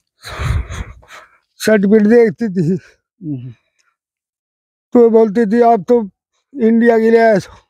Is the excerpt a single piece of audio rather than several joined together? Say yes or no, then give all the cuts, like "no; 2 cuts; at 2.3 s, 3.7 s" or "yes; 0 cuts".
yes; 0 cuts